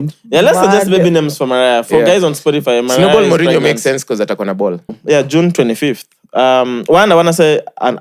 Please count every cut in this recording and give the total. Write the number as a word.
one